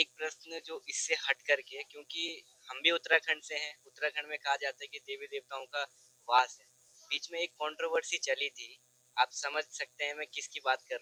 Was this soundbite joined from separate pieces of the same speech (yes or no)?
no